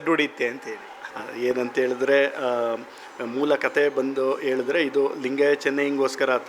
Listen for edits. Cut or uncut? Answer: uncut